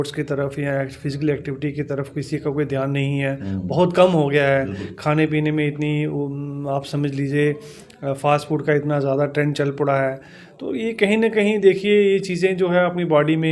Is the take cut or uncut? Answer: uncut